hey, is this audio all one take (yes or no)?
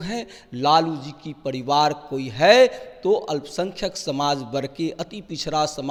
yes